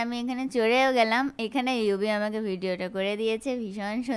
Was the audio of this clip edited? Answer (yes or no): no